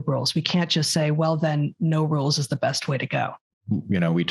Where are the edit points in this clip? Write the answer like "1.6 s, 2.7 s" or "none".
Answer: 3.4 s